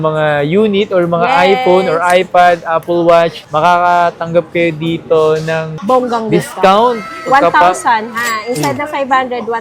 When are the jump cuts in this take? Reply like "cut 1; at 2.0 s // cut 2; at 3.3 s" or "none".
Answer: none